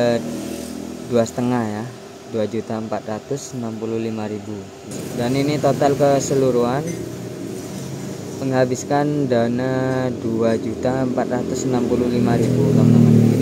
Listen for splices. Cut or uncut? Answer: cut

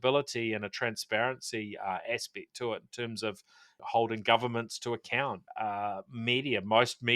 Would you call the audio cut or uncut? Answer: cut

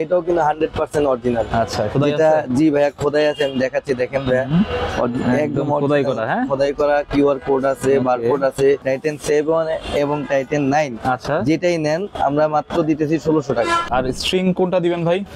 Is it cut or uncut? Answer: cut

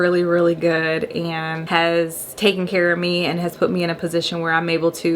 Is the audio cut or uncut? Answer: cut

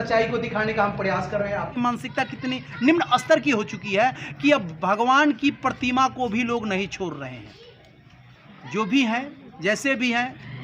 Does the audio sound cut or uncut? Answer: cut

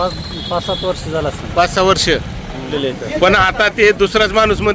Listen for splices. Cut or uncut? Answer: cut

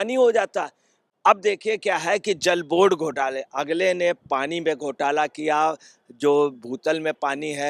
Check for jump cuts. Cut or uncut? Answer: cut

